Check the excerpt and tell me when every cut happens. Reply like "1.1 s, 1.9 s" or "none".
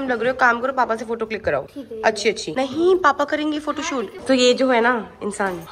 none